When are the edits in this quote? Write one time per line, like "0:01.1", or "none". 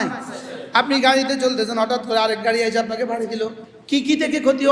0:03.7